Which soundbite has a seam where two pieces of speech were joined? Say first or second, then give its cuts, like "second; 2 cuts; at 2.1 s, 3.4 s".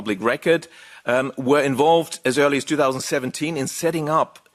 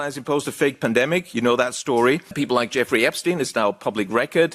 second; 1 cut; at 2.3 s